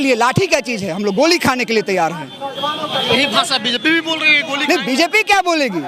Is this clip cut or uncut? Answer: uncut